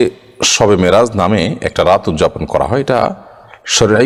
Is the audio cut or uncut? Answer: uncut